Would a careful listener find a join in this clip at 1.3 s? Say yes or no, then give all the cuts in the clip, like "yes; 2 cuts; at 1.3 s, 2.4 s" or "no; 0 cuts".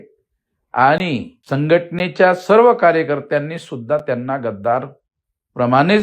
yes; 1 cut; at 1.3 s